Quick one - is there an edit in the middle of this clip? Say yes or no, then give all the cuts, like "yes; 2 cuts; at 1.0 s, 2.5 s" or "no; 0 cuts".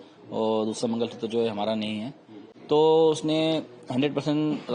yes; 1 cut; at 2.5 s